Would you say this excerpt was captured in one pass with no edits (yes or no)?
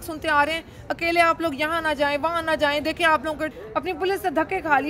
no